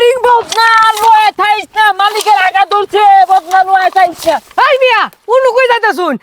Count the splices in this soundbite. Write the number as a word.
zero